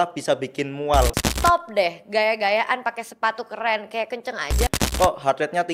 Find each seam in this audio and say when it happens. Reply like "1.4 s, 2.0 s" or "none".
1.2 s, 4.7 s

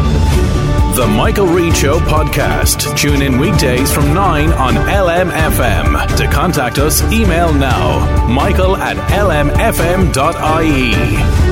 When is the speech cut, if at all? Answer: none

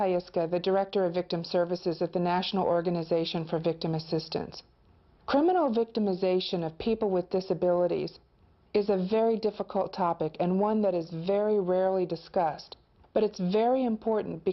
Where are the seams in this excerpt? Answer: 3.2 s

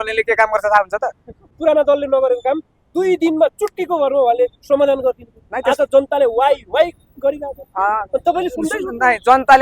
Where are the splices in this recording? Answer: 1.6 s

